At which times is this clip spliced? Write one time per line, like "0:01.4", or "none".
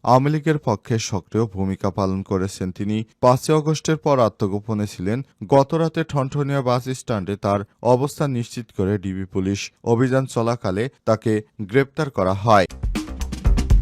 0:12.8